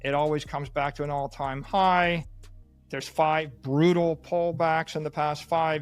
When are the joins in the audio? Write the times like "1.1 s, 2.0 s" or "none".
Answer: none